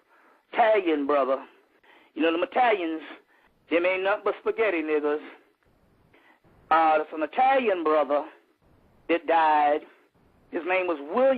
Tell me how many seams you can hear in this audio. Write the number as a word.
one